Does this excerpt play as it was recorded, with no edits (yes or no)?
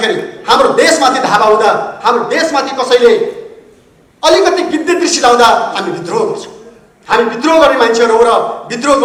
yes